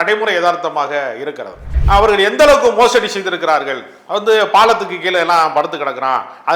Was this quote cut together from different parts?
yes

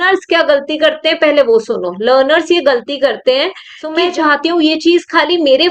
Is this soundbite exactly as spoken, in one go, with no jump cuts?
no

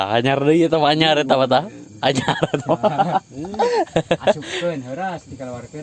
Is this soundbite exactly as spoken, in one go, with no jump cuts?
yes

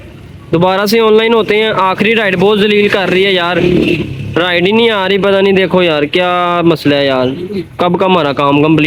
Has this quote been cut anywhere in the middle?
no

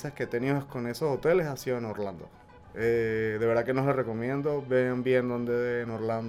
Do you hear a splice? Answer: no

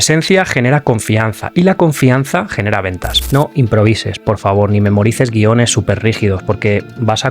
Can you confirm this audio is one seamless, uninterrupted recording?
no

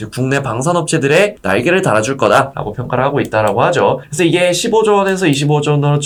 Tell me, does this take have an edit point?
no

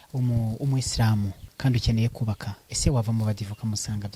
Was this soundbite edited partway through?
no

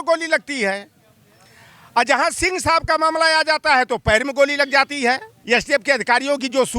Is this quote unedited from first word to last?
no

